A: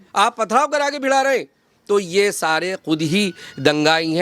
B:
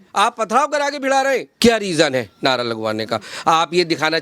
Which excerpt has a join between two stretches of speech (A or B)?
B